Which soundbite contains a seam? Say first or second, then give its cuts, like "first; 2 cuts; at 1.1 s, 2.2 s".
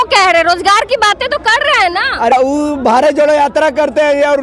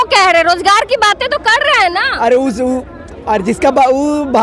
first; 1 cut; at 2.3 s